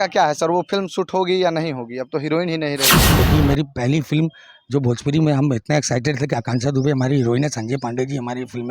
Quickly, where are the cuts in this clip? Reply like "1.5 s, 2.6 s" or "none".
3.0 s